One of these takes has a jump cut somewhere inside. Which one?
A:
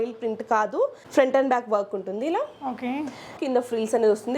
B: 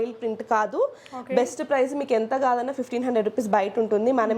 A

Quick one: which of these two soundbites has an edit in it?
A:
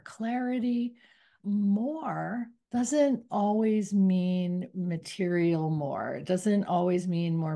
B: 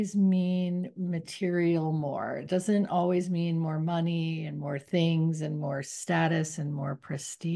A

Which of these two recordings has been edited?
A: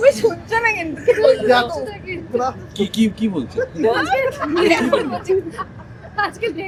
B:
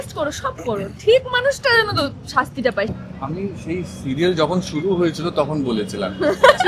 B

